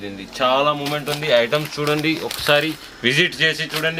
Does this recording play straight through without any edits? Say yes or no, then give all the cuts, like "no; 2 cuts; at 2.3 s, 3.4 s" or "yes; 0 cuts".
yes; 0 cuts